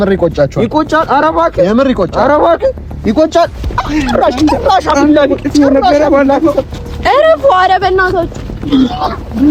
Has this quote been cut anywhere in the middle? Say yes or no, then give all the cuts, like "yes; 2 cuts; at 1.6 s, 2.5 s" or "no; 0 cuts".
no; 0 cuts